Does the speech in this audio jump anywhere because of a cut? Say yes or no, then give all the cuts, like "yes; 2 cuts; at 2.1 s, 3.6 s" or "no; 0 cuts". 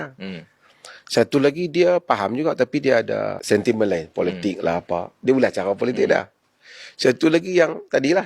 yes; 1 cut; at 3.4 s